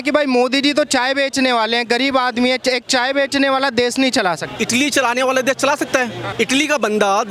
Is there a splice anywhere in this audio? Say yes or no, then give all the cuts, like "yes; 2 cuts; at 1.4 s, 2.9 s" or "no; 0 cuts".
yes; 2 cuts; at 4.5 s, 6.2 s